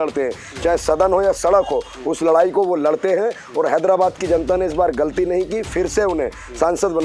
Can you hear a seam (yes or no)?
no